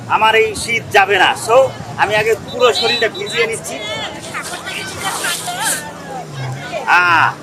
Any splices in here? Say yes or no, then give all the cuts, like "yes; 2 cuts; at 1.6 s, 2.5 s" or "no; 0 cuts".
no; 0 cuts